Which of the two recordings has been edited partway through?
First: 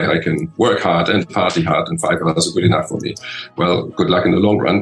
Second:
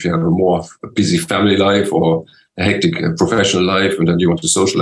first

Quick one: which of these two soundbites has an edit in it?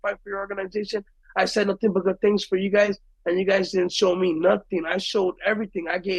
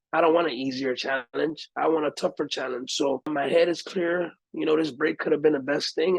second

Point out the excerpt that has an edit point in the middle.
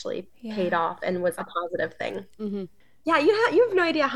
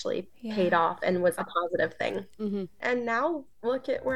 second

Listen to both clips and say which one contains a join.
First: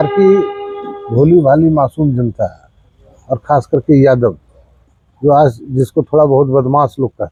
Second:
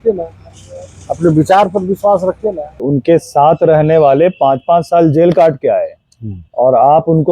second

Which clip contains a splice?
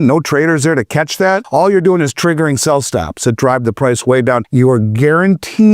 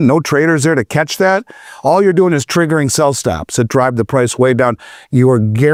first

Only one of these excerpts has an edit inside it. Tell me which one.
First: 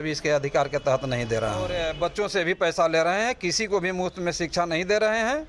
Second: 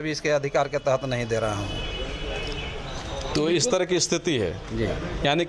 first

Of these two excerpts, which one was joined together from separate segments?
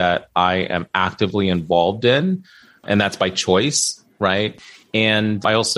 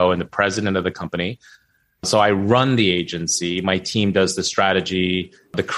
first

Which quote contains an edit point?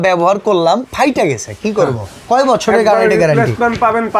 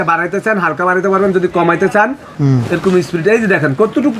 second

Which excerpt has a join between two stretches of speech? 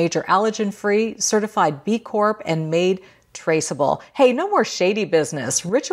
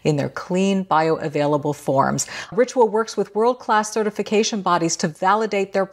second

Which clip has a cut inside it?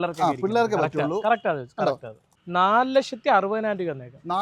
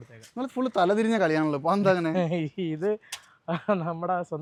first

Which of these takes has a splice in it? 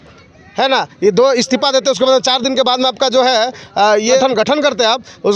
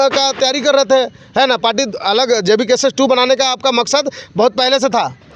first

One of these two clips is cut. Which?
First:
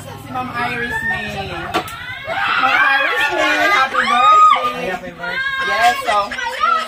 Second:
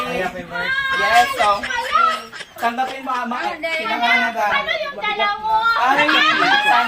second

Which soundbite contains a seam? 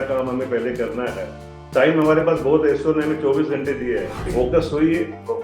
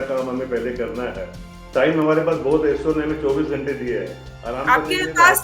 first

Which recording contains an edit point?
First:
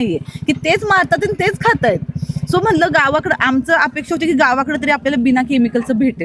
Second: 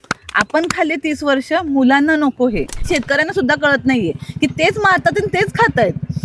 second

